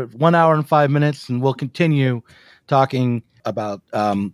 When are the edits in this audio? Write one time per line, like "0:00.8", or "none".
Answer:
0:03.4